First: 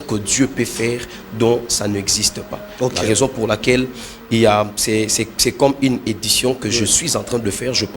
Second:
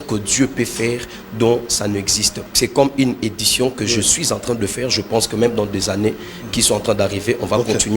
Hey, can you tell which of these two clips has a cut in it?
second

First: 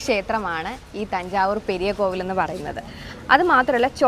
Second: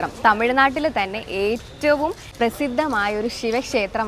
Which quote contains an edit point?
second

